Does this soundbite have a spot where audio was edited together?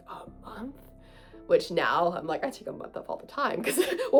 no; 0 cuts

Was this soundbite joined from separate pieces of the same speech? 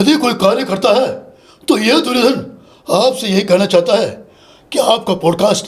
no; 0 cuts

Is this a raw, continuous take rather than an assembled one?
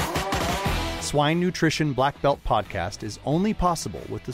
no; 1 cut; at 0.9 s

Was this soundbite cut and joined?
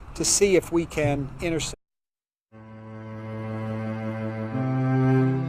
no; 0 cuts

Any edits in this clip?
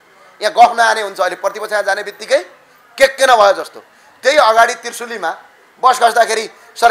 no; 0 cuts

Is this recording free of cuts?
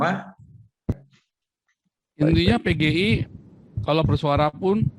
no; 1 cut; at 0.9 s

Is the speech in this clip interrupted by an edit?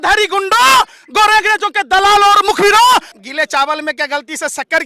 yes; 1 cut; at 3.2 s

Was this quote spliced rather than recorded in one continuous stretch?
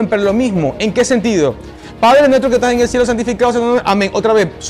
no; 0 cuts

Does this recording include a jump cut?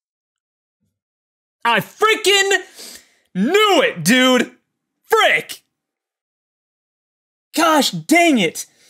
no; 0 cuts

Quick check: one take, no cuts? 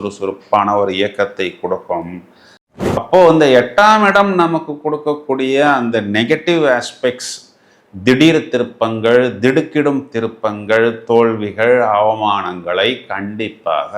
no; 1 cut; at 3.0 s

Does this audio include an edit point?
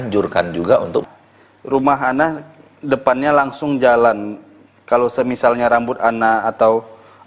yes; 1 cut; at 1.1 s

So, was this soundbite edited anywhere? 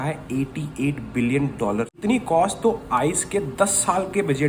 yes; 1 cut; at 1.9 s

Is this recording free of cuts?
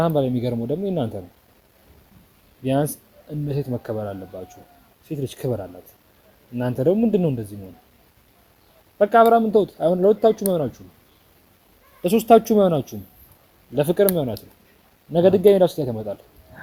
yes; 0 cuts

